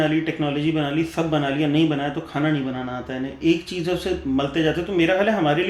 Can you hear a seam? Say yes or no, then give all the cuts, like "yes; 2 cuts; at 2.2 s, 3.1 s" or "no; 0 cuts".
no; 0 cuts